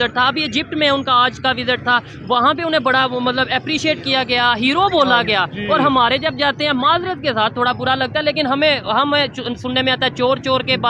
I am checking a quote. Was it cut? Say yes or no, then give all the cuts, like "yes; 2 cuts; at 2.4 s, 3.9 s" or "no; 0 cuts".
no; 0 cuts